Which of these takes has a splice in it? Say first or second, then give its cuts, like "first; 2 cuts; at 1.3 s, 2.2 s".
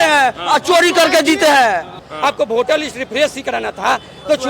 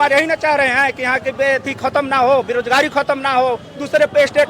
first; 1 cut; at 2.0 s